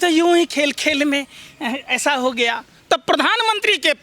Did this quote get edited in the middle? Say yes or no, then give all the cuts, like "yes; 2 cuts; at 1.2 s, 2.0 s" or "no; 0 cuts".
yes; 1 cut; at 2.7 s